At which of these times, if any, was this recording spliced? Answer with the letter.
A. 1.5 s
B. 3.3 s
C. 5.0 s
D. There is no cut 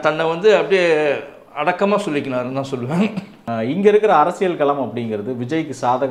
B